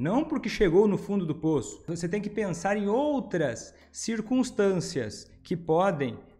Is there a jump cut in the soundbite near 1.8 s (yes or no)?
yes